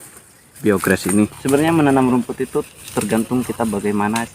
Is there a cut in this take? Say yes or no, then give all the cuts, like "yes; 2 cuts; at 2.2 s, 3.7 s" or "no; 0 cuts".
yes; 1 cut; at 1.4 s